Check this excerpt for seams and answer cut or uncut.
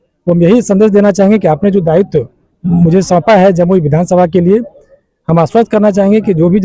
uncut